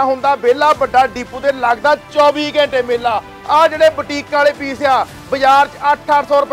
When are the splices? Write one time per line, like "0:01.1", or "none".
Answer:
0:03.3